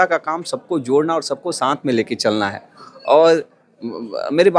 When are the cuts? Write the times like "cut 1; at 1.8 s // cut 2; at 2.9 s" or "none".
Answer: none

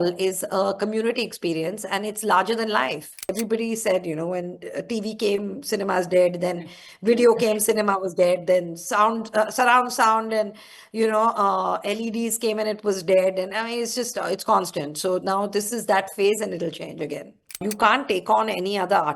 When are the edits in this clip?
cut 1; at 3.3 s // cut 2; at 17.6 s

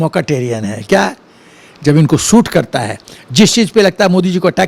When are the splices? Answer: none

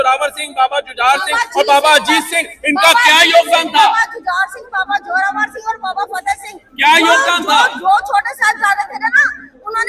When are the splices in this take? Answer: none

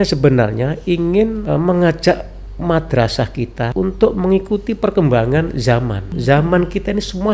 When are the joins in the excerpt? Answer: cut 1; at 1.4 s // cut 2; at 3.7 s // cut 3; at 6.1 s

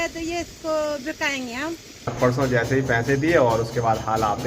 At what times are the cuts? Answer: cut 1; at 2.1 s

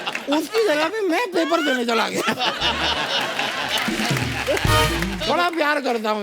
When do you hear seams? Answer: cut 1; at 5.2 s

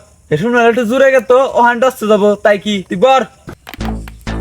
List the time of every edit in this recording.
cut 1; at 3.5 s

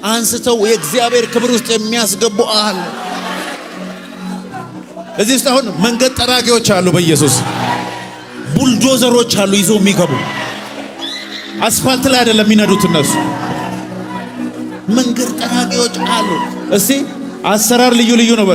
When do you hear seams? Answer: none

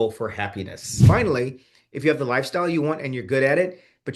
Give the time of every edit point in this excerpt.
cut 1; at 1.0 s

